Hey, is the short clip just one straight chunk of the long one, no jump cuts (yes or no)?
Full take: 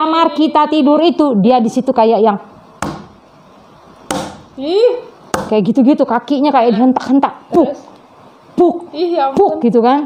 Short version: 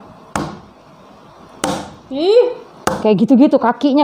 yes